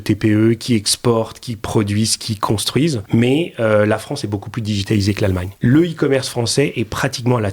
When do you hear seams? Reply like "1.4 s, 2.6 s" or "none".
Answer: 3.0 s, 5.5 s